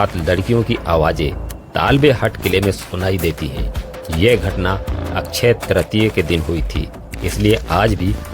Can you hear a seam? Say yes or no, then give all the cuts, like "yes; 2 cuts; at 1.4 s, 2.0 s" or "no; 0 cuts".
no; 0 cuts